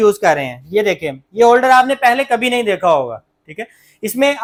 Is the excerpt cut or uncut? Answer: uncut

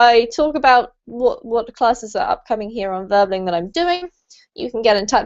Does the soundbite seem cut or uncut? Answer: cut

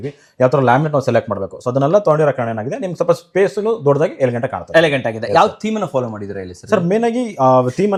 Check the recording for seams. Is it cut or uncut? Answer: uncut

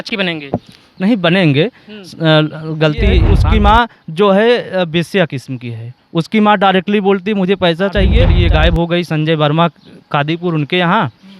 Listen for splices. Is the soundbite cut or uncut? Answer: cut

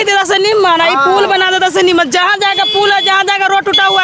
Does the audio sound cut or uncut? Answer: uncut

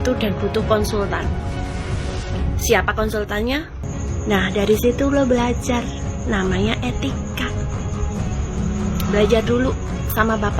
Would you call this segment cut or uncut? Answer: cut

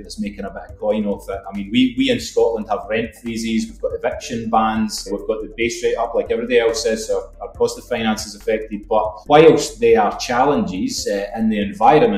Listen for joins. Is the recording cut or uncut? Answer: uncut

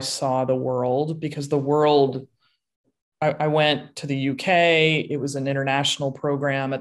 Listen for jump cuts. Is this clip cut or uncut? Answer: uncut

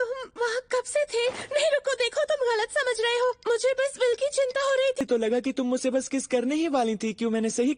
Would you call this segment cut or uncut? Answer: cut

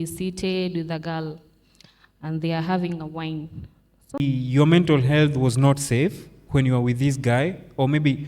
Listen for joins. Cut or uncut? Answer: cut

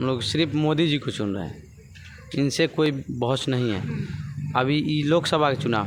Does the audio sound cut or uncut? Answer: uncut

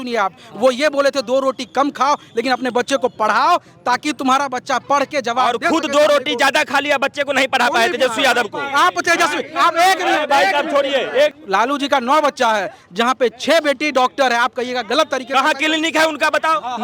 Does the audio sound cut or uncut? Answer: cut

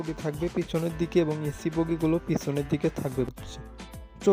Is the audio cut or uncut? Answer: cut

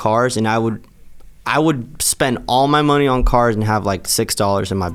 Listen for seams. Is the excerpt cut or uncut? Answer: uncut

